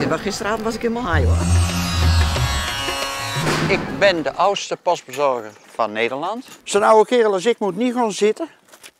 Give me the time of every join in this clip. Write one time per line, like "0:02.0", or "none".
0:03.7
0:06.5